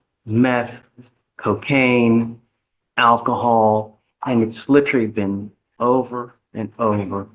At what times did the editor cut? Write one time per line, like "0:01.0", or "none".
none